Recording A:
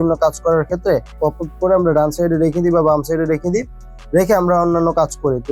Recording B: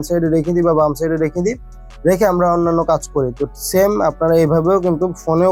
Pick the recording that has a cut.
A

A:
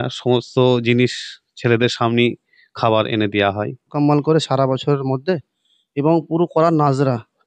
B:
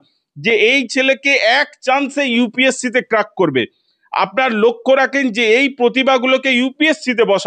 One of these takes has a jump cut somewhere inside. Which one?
A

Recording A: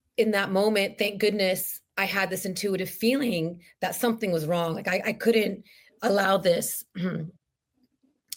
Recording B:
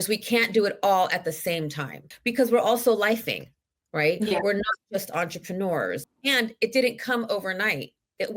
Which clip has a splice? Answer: B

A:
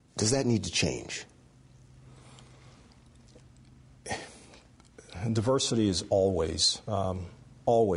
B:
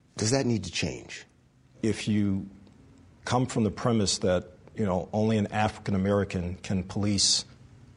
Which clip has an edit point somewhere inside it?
B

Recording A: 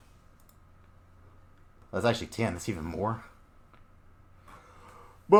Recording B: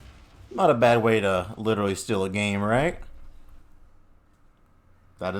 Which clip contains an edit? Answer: B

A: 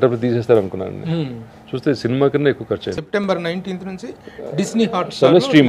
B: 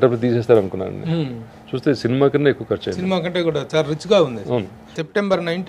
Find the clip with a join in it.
A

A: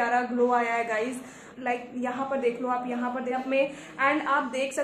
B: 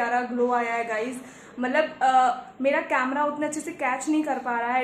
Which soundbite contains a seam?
A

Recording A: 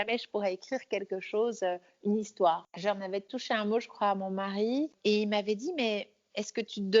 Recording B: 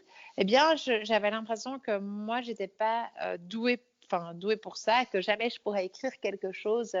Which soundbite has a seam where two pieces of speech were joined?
A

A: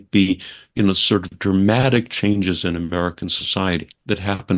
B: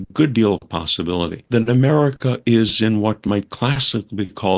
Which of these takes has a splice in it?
B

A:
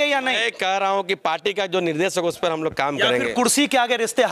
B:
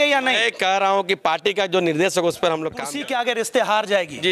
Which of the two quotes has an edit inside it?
B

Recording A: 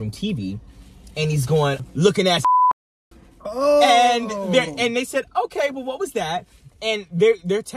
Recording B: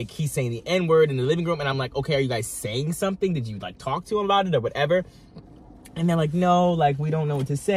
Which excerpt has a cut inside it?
A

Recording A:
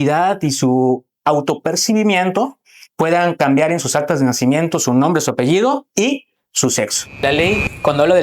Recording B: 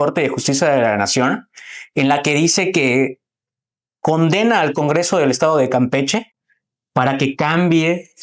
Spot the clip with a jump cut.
A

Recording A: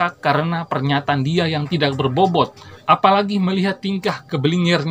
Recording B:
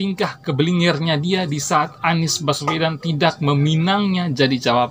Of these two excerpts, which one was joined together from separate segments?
A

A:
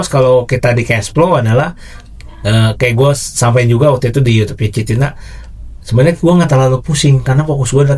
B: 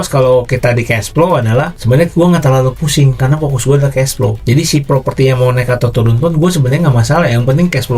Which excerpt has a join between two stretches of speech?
B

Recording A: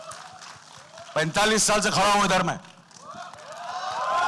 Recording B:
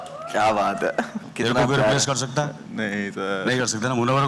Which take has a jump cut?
B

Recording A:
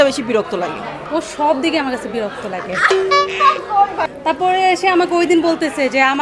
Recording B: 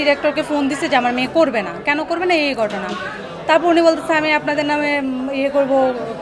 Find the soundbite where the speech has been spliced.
A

